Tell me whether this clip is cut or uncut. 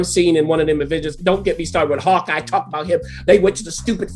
uncut